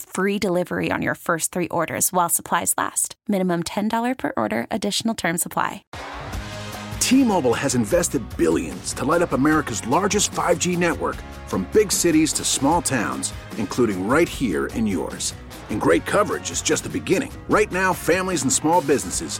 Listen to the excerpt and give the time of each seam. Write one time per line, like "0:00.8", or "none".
0:05.8